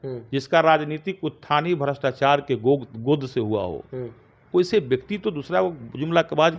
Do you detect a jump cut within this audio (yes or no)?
no